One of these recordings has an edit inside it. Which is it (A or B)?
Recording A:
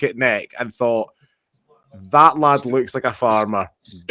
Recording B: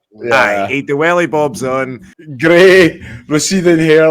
B